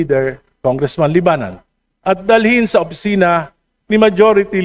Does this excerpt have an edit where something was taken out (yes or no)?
no